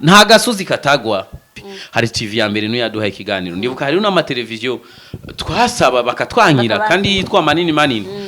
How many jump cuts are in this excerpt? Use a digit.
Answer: 1